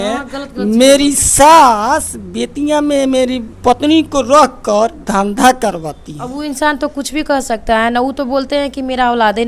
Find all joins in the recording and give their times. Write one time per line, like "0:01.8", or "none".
none